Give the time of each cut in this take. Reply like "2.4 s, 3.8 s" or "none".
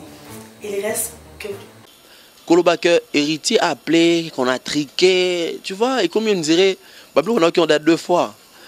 1.8 s